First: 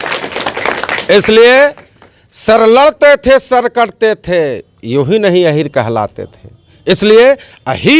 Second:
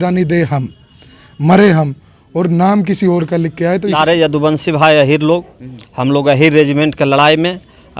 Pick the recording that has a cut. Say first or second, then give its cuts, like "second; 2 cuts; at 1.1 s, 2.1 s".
second; 1 cut; at 3.9 s